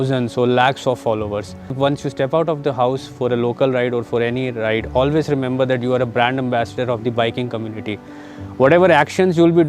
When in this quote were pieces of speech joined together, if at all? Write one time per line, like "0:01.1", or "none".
0:01.8